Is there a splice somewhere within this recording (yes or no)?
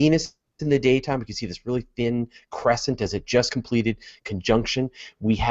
yes